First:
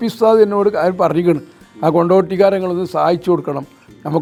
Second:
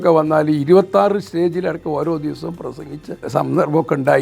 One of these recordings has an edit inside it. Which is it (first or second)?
second